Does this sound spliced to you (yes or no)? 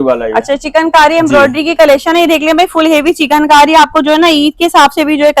no